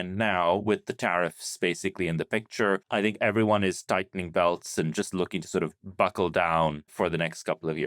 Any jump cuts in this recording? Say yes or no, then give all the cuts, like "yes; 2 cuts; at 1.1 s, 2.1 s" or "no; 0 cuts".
yes; 2 cuts; at 2.8 s, 6.9 s